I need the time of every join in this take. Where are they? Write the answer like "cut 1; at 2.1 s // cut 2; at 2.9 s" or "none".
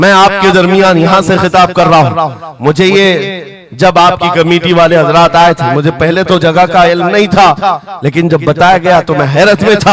none